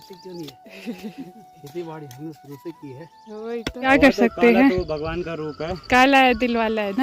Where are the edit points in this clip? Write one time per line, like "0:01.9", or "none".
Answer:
0:03.9